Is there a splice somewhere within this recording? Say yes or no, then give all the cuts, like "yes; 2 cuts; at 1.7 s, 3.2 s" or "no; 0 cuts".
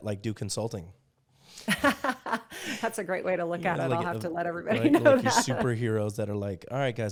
no; 0 cuts